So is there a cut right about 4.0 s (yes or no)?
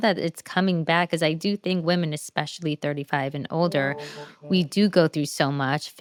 no